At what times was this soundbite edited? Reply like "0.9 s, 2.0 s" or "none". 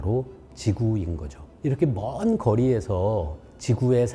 none